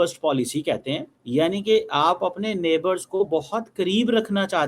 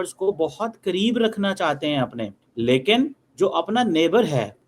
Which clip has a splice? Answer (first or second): second